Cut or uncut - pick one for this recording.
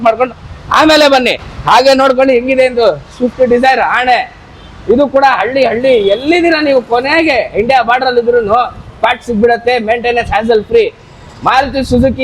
uncut